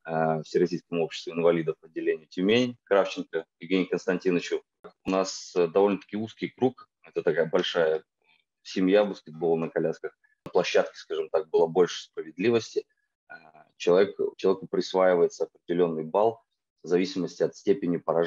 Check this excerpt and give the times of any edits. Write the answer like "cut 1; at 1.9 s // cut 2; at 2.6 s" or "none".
cut 1; at 4.9 s // cut 2; at 10.5 s